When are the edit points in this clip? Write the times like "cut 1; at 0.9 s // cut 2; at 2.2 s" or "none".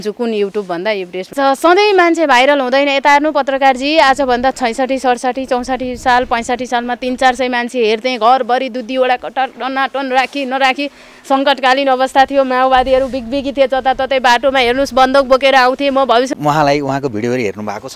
cut 1; at 1.3 s // cut 2; at 16.3 s